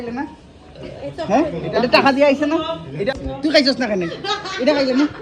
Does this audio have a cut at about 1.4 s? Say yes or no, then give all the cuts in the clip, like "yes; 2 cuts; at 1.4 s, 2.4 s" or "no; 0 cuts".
no; 1 cut; at 3.1 s